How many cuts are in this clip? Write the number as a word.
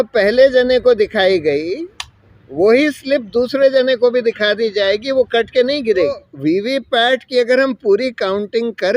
one